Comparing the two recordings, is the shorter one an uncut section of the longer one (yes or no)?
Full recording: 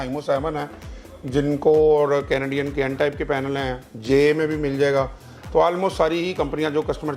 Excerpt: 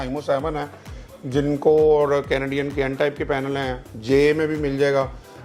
yes